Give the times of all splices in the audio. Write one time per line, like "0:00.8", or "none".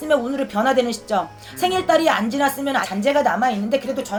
none